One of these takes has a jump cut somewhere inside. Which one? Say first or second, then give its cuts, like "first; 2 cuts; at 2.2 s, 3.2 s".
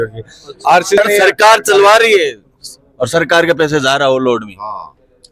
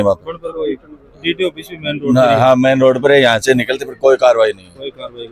first; 1 cut; at 1.0 s